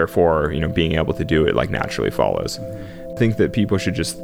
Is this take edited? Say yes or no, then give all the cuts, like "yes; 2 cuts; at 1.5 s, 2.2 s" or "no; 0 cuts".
yes; 1 cut; at 3.1 s